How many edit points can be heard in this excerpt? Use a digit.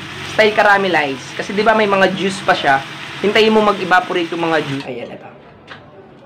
1